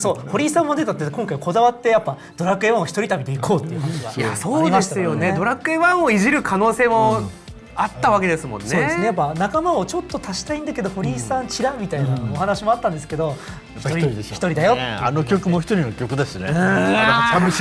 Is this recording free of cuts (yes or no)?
yes